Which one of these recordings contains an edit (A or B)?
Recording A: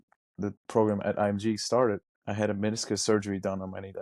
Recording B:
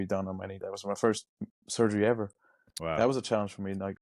A